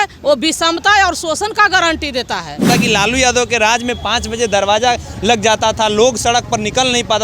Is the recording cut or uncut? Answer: cut